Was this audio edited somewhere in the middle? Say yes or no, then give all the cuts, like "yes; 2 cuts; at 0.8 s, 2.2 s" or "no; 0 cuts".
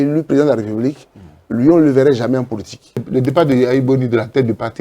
yes; 1 cut; at 3.0 s